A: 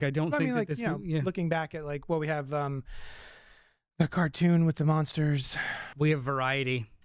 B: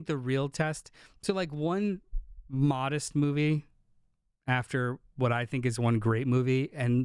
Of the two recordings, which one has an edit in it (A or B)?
A